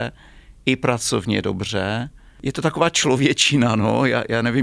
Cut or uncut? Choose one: uncut